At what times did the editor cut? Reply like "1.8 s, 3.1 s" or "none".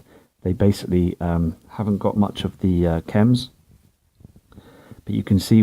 2.9 s